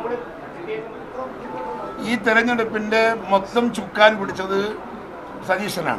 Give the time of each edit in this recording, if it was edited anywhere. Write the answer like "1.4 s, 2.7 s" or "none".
0.9 s